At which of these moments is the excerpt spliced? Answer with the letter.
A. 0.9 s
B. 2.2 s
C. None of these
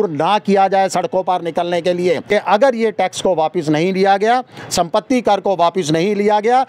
B